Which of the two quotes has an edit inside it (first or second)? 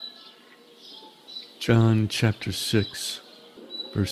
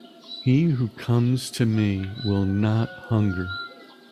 first